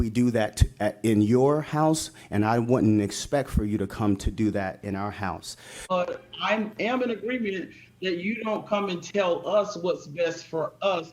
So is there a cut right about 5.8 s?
yes; 1 cut; at 5.8 s

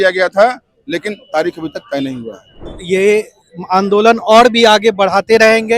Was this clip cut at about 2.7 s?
yes; 1 cut; at 2.7 s

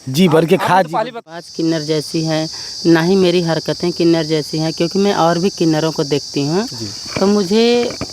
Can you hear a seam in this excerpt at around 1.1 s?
yes; 1 cut; at 1.1 s

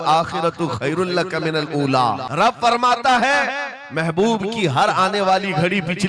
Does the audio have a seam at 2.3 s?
yes; 1 cut; at 2.3 s

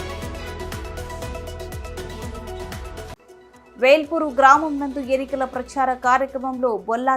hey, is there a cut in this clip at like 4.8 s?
no; 2 cuts; at 1.4 s, 2.5 s

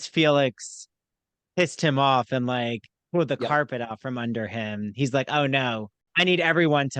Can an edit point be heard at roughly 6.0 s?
yes; 1 cut; at 6.0 s

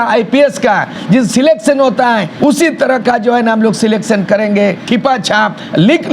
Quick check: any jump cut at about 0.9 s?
yes; 3 cuts; at 0.9 s, 2.3 s, 4.8 s

